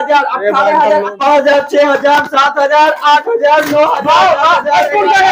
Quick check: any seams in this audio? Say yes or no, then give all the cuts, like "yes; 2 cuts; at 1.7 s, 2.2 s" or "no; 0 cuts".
yes; 1 cut; at 1.1 s